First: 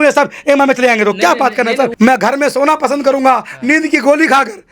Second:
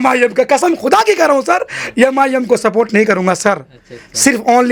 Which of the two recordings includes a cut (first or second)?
first